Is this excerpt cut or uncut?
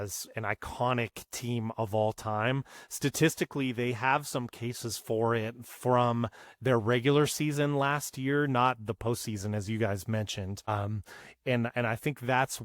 cut